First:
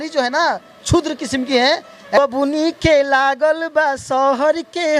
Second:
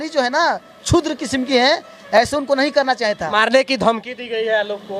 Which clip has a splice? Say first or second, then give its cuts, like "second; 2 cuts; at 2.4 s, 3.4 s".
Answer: first; 1 cut; at 2.2 s